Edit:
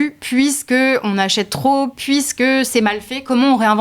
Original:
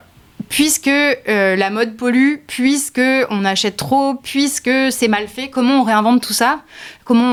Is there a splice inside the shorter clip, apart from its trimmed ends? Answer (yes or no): no